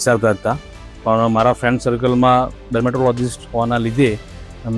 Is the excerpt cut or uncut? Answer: cut